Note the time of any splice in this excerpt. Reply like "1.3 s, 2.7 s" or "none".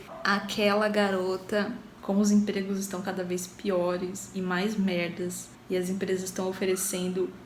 1.9 s